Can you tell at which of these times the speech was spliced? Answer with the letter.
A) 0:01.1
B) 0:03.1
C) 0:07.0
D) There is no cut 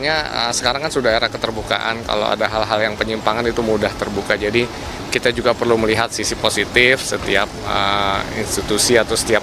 D